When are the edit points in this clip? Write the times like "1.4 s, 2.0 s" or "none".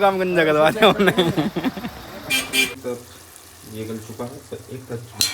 2.8 s